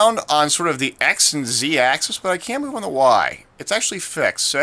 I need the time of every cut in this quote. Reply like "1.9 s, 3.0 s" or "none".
none